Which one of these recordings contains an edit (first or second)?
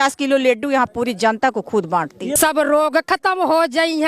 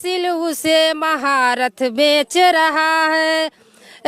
first